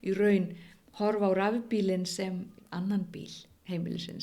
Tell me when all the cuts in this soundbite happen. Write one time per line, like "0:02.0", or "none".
0:02.5